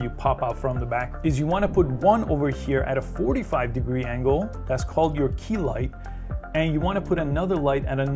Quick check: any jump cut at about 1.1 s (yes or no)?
yes